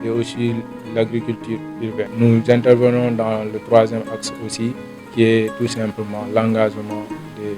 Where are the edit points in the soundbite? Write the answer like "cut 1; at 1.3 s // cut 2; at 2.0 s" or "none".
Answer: cut 1; at 2.1 s